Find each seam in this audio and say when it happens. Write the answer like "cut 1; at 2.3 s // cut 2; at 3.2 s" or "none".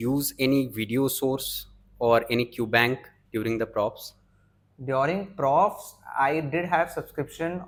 none